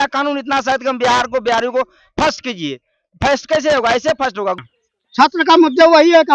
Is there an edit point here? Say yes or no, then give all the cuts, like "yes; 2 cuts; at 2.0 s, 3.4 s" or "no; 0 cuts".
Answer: yes; 1 cut; at 4.6 s